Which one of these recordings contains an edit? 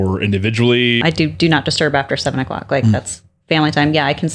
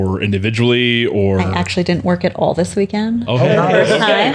first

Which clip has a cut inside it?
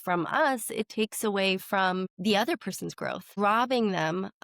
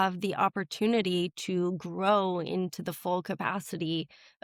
first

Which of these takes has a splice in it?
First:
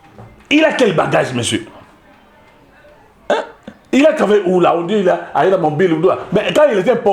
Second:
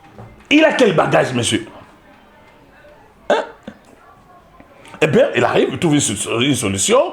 second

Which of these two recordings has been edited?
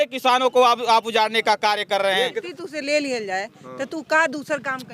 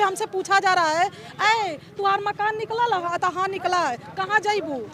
first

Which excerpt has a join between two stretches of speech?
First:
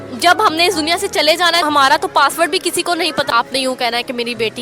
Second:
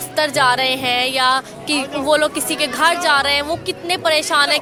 first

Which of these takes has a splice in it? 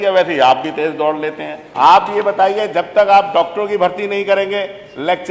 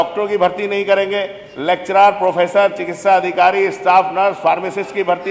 first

